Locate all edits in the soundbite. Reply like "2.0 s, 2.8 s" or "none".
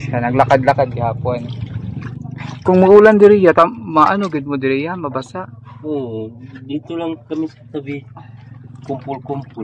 2.2 s